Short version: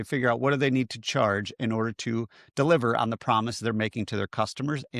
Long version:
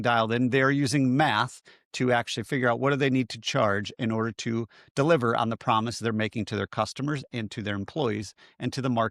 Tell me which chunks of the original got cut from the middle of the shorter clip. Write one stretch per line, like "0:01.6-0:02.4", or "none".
none